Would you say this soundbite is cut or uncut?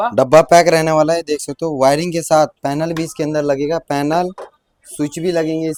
uncut